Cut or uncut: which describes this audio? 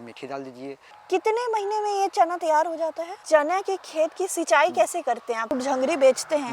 cut